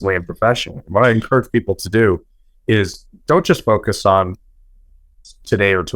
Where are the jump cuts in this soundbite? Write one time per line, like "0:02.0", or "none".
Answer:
none